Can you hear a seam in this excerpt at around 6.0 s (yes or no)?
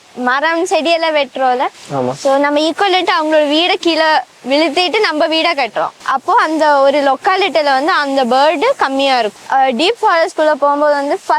yes